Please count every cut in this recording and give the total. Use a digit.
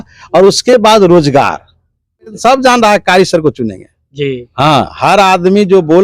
1